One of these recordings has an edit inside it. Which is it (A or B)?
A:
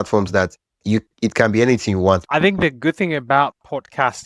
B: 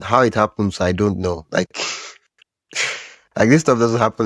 A